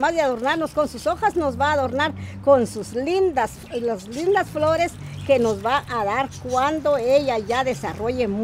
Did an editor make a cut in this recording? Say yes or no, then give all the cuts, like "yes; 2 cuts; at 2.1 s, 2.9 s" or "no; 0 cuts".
no; 0 cuts